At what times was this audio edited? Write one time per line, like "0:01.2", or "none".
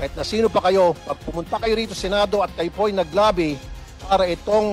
0:01.1